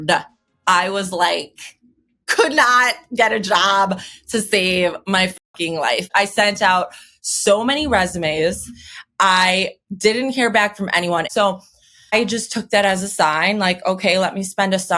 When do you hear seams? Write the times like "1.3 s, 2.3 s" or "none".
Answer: 6.1 s, 11.3 s